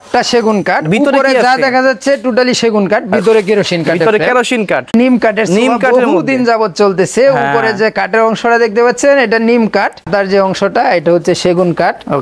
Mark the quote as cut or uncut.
cut